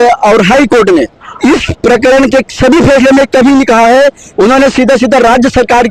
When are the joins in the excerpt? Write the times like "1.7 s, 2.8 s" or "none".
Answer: 1.2 s, 4.2 s